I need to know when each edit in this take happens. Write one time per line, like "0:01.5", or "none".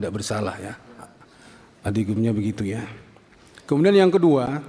none